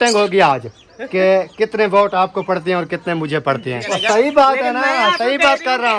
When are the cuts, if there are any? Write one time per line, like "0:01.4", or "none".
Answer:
0:03.8